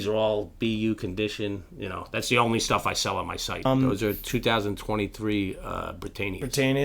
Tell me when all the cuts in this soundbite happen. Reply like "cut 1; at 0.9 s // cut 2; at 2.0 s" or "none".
cut 1; at 3.7 s